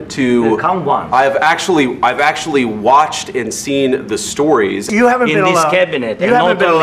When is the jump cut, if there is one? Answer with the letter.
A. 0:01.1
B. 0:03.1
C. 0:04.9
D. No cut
C